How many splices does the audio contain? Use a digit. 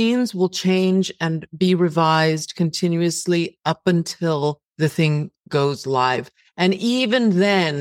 1